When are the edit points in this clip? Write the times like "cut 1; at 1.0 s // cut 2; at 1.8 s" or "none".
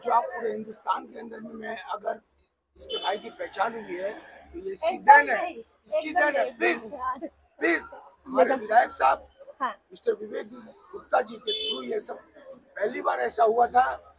none